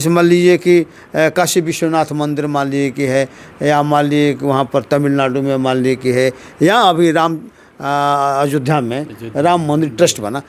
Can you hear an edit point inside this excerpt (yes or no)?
no